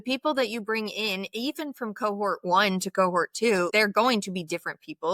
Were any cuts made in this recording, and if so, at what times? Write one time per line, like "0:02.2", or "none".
0:03.7